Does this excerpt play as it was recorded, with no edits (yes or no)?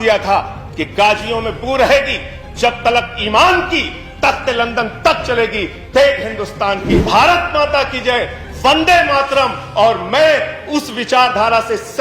no